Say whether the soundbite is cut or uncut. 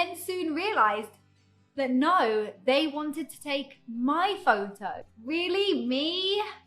cut